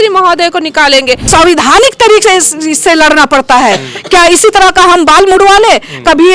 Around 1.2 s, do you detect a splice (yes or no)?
yes